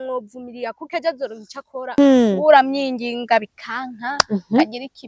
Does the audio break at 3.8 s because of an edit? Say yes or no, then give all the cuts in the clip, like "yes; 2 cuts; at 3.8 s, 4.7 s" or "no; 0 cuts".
no; 1 cut; at 2.0 s